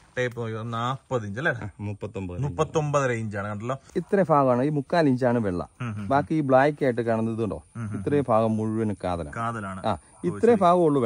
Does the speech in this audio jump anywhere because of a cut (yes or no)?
yes